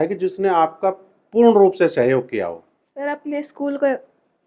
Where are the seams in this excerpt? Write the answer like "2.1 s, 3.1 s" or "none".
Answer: none